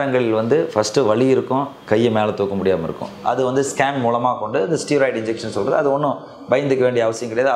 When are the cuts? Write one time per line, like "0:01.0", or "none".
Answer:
0:03.1